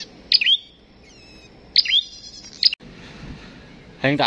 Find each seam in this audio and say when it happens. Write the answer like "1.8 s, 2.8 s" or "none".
2.8 s